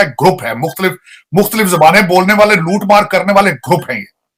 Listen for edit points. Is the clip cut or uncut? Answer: uncut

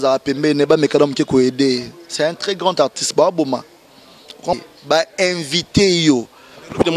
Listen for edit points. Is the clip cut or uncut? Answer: cut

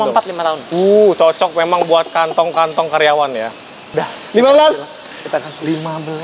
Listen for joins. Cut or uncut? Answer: cut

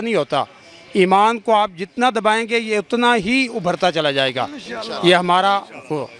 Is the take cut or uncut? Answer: uncut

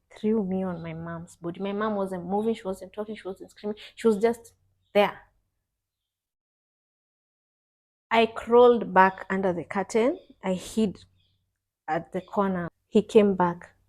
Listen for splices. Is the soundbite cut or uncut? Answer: cut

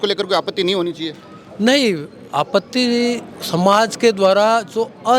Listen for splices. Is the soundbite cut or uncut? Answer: uncut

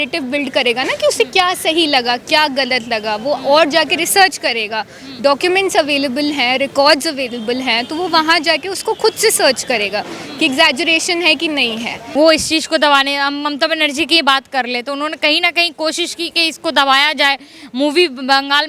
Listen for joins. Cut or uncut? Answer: cut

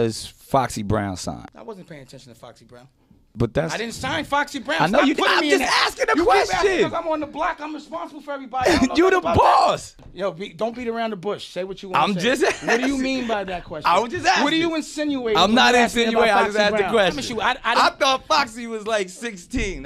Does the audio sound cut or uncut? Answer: cut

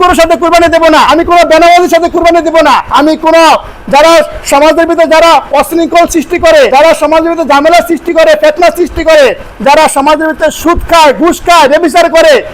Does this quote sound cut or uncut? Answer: cut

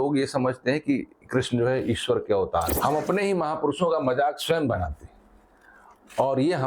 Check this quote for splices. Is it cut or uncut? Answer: cut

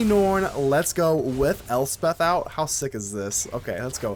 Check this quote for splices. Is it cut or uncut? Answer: uncut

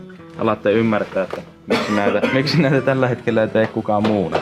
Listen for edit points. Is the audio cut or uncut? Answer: uncut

